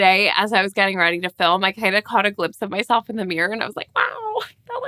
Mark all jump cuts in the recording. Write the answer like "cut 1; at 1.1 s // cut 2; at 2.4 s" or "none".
none